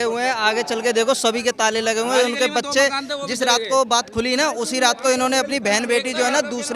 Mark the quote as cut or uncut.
uncut